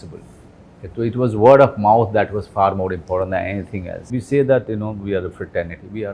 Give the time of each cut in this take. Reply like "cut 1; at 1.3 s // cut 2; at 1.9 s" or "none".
cut 1; at 4.0 s